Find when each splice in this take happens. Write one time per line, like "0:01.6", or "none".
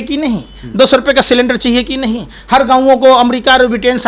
none